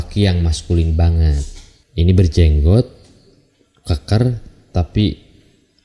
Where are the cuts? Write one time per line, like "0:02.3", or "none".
none